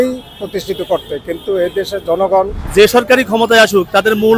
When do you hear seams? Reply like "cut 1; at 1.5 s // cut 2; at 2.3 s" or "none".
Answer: cut 1; at 2.6 s